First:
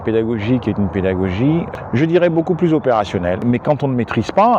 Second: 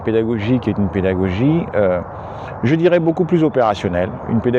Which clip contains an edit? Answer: first; 2 cuts; at 1.7 s, 3.4 s

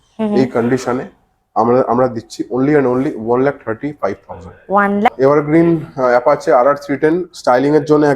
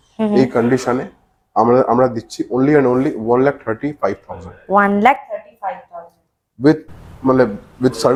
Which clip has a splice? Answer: first; 1 cut; at 5.1 s

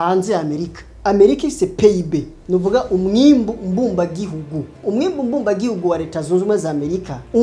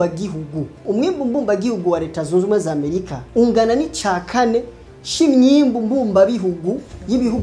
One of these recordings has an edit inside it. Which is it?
first; 1 cut; at 0.9 s

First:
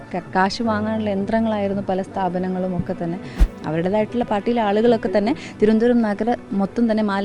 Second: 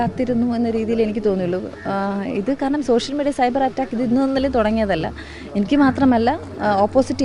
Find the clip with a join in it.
first; 1 cut; at 3.4 s

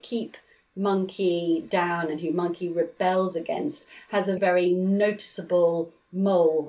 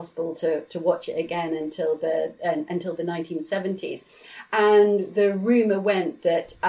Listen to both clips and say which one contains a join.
first; 1 cut; at 4.4 s

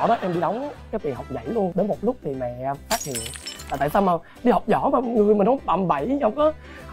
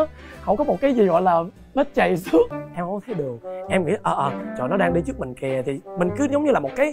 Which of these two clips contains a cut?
second; 1 cut; at 2.5 s

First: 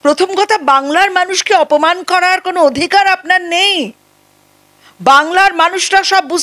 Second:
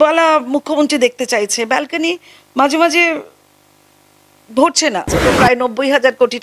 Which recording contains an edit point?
second; 1 cut; at 5.2 s

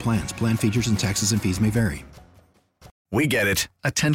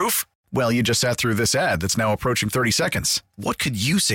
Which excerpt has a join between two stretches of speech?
first; 1 cut; at 2.9 s

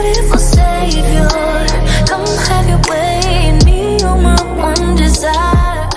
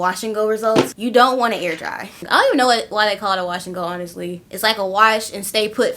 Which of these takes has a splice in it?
second; 2 cuts; at 1.0 s, 2.2 s

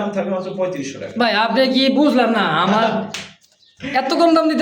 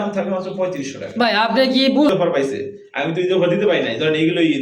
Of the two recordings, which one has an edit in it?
second; 1 cut; at 2.1 s

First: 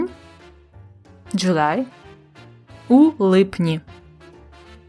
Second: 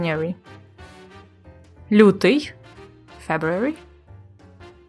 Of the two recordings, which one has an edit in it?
first; 1 cut; at 3.9 s

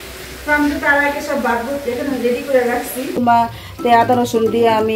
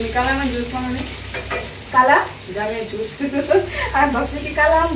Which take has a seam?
first; 1 cut; at 3.2 s

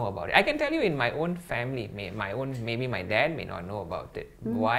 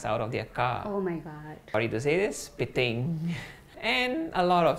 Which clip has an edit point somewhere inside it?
second; 2 cuts; at 1.7 s, 3.7 s

